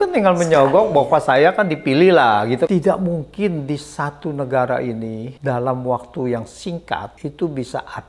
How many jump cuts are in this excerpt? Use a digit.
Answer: 3